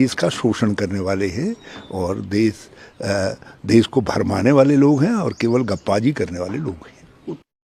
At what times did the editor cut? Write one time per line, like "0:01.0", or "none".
none